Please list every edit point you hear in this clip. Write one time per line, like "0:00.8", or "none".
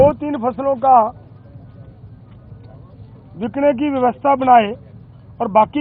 none

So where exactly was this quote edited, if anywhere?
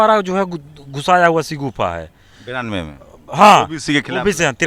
none

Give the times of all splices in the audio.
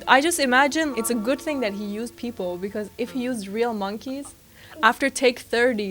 0:00.9

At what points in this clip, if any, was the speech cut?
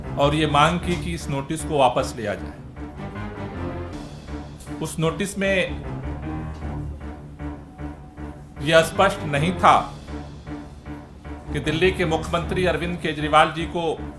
0:03.0
0:04.8
0:05.7
0:08.6

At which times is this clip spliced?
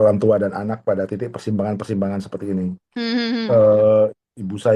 none

